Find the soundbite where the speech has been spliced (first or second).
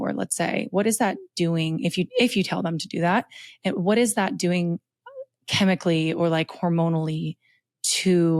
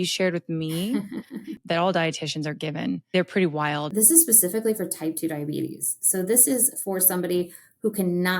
second